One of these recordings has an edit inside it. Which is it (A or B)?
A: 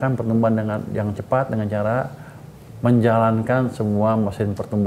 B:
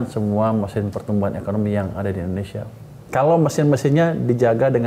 B